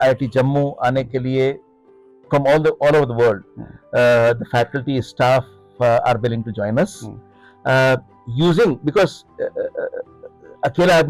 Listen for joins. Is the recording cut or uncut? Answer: uncut